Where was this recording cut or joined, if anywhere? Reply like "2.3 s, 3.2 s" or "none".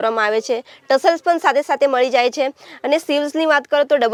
none